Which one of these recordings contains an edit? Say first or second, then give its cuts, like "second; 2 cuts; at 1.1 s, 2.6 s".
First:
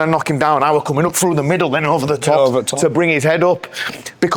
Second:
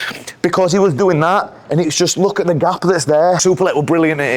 second; 1 cut; at 3.4 s